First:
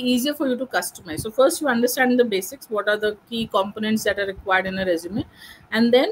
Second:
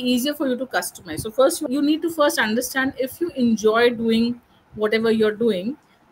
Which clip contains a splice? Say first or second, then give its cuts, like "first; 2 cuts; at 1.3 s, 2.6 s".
second; 1 cut; at 1.6 s